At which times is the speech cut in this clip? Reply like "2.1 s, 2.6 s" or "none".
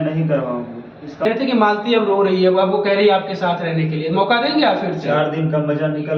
1.2 s